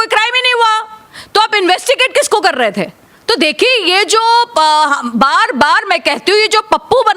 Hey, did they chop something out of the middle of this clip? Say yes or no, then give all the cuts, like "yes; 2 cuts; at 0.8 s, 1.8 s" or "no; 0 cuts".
no; 0 cuts